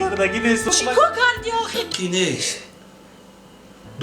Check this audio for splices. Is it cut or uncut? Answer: cut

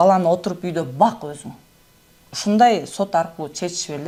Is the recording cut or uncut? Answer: uncut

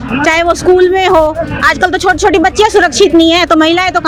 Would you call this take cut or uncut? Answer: uncut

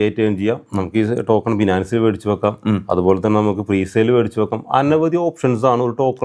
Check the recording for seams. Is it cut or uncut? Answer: uncut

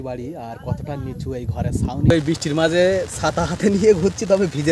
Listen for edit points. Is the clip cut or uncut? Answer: cut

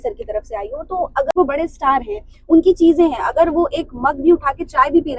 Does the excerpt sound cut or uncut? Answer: cut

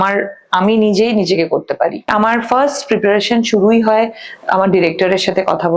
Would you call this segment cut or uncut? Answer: cut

